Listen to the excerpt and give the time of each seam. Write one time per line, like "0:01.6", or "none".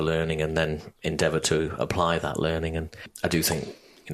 0:03.1